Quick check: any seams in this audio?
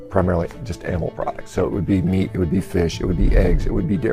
no; 0 cuts

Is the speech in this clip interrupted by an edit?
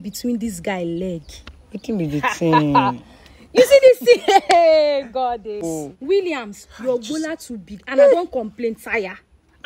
yes; 1 cut; at 5.6 s

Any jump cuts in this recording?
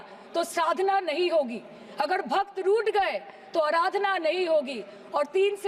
no; 0 cuts

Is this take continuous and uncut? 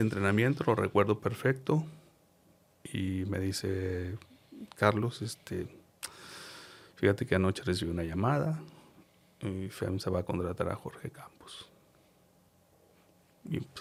yes; 0 cuts

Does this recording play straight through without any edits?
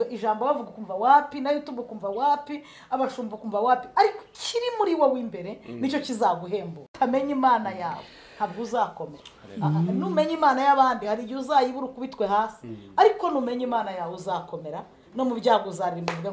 no; 1 cut; at 6.8 s

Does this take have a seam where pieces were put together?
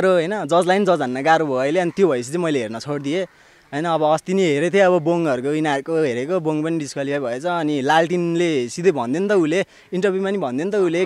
no; 0 cuts

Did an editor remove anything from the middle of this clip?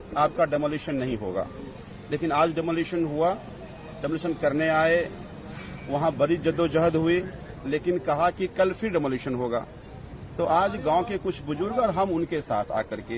no; 0 cuts

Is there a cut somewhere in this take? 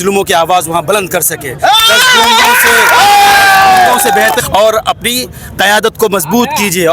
yes; 1 cut; at 4.4 s

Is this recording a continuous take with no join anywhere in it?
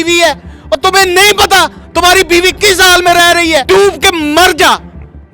no; 1 cut; at 3.6 s

